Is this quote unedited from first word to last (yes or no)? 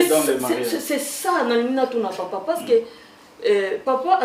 yes